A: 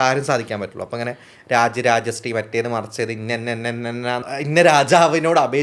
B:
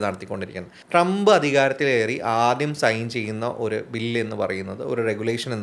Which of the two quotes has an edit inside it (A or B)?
A